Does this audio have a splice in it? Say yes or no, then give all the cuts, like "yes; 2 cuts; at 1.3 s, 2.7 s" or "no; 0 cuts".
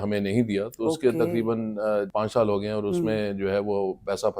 yes; 1 cut; at 2.1 s